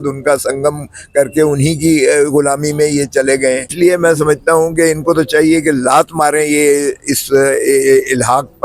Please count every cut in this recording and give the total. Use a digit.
1